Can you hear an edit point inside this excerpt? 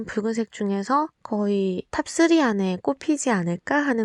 no; 0 cuts

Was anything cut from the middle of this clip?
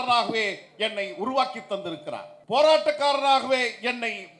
yes; 1 cut; at 2.3 s

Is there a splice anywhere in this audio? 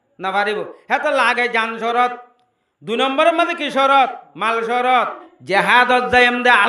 yes; 1 cut; at 5.3 s

